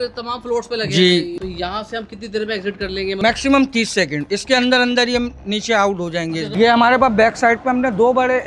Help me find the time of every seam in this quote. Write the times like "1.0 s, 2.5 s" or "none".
1.3 s, 3.2 s, 6.5 s